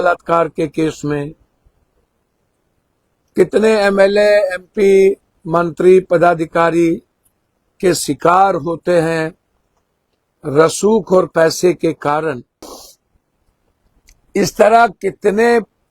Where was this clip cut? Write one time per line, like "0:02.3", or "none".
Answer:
0:12.6